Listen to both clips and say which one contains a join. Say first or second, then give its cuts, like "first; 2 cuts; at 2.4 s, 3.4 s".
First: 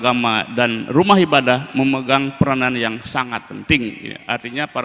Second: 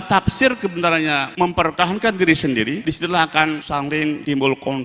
second; 3 cuts; at 1.6 s, 2.8 s, 3.9 s